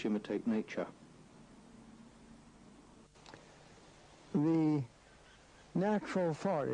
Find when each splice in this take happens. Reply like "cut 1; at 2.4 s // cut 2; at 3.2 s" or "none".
cut 1; at 3.1 s